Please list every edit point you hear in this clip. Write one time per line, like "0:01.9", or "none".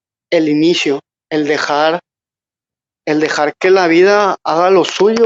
none